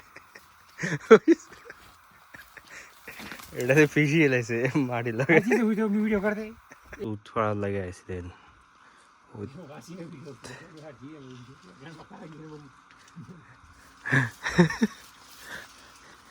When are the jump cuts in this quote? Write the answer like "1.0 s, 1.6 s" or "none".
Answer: 7.0 s